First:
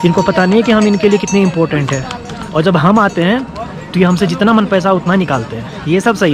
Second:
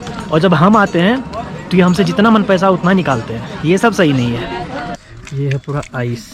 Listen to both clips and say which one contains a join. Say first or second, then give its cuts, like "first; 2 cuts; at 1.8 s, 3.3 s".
second; 1 cut; at 5.1 s